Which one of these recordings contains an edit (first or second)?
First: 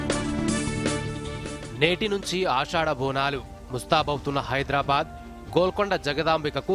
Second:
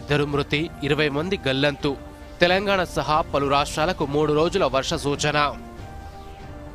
first